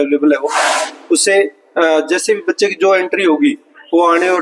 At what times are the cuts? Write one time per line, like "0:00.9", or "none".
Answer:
none